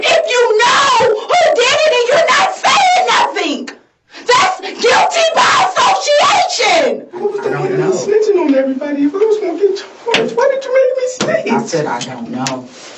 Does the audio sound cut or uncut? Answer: cut